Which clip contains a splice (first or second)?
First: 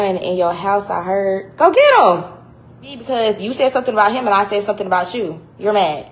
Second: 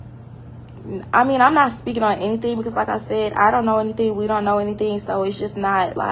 first